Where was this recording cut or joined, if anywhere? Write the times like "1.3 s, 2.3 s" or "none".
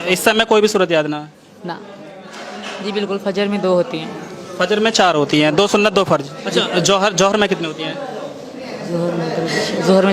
1.9 s, 6.4 s